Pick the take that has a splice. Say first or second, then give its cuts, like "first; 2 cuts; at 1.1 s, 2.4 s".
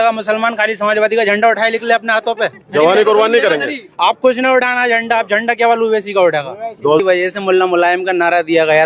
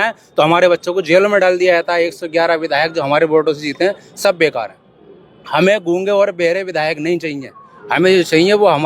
first; 1 cut; at 7.0 s